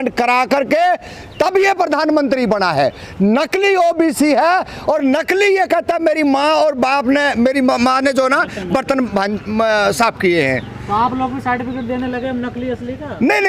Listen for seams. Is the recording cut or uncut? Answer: uncut